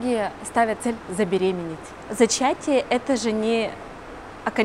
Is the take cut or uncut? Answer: uncut